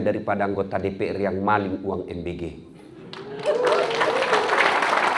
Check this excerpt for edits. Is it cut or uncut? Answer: uncut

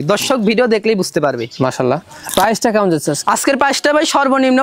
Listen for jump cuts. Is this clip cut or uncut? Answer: cut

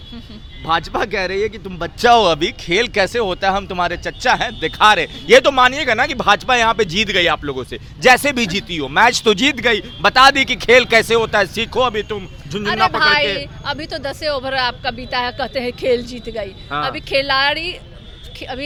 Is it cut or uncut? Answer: uncut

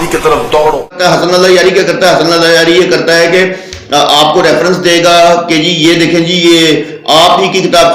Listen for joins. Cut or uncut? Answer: cut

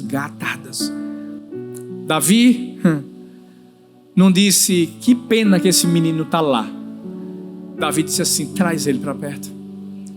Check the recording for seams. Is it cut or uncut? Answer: uncut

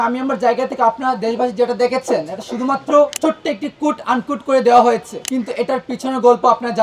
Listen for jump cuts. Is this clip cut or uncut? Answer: cut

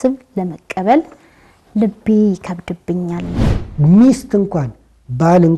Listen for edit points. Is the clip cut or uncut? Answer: cut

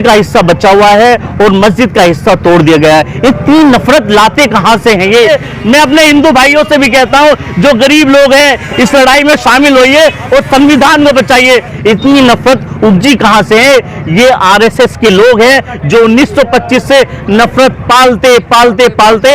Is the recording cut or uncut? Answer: cut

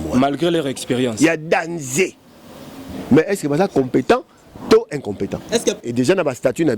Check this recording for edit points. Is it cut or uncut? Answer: cut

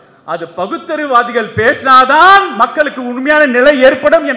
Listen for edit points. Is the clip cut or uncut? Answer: uncut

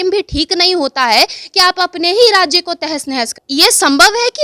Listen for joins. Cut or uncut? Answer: cut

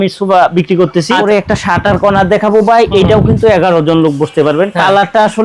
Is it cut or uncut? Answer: cut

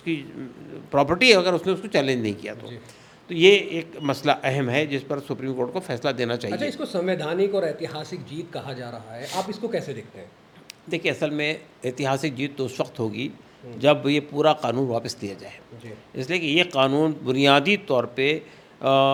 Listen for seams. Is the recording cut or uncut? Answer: uncut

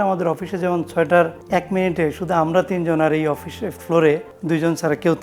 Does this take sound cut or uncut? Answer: cut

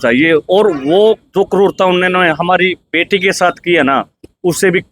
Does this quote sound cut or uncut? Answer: uncut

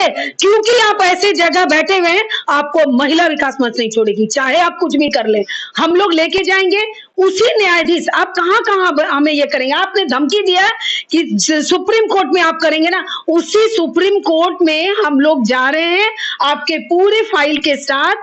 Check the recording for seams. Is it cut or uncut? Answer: uncut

